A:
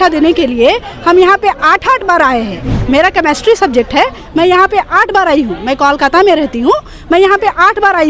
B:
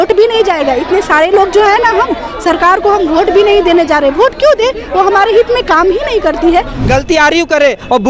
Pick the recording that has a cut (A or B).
B